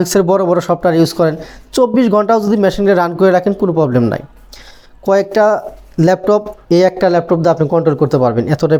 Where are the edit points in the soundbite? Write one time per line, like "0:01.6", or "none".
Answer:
none